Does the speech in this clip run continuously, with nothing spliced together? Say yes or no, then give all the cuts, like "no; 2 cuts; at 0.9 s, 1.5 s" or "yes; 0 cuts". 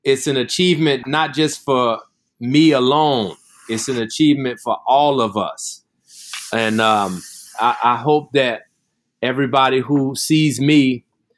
no; 1 cut; at 1.0 s